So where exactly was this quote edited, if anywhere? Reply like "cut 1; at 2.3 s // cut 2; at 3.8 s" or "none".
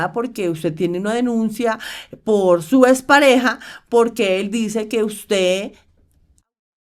none

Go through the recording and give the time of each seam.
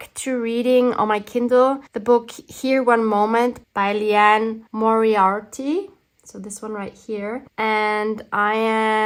none

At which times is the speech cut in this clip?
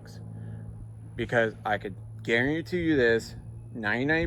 none

